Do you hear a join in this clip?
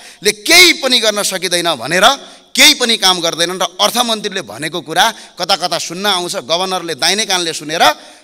no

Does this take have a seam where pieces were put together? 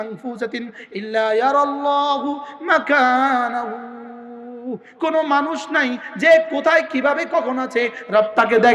no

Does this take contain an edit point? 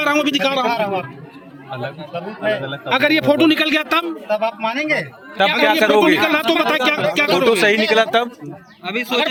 no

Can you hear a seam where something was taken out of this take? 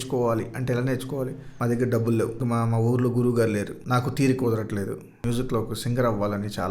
yes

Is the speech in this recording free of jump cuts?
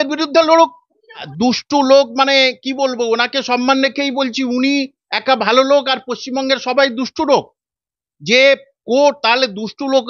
no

